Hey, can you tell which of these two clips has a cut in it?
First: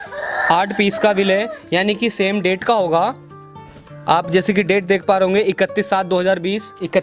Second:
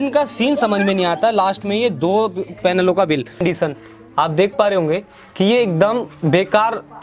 second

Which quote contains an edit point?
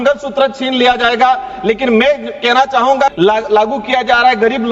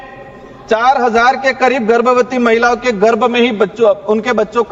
first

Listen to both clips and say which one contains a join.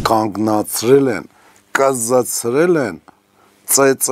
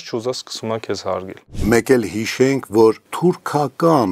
second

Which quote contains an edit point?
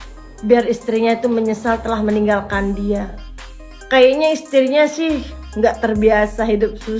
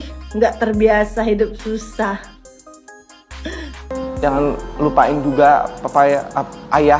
second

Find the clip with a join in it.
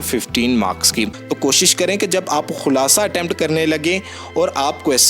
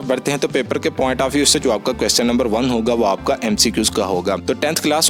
first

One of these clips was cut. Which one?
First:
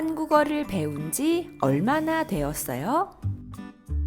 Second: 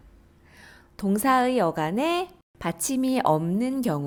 first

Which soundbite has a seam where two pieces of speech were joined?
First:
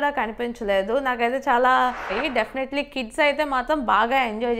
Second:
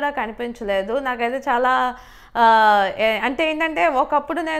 first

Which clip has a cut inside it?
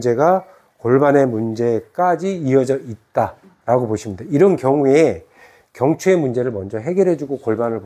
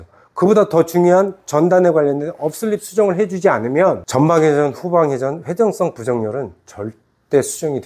second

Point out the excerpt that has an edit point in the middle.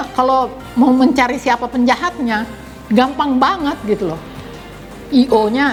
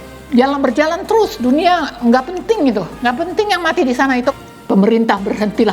second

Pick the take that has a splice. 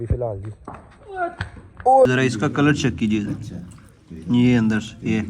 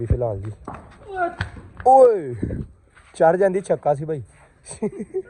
first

